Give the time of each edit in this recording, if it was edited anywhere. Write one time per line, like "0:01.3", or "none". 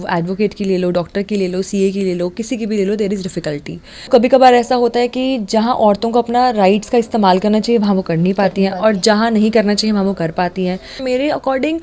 0:04.1
0:11.0